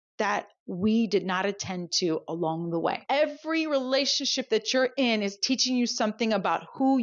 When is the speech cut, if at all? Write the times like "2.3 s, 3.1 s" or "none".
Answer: 3.0 s